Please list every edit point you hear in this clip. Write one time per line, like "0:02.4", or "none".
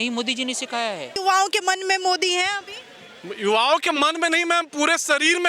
0:01.1